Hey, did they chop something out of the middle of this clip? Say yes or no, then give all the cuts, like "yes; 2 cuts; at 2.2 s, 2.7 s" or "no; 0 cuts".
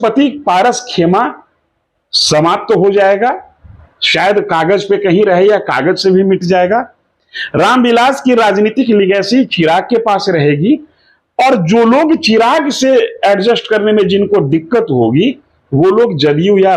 no; 0 cuts